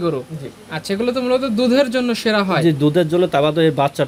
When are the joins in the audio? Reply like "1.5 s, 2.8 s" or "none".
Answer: none